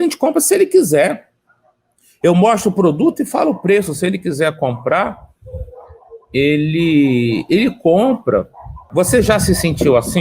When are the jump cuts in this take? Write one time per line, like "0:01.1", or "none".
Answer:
0:08.8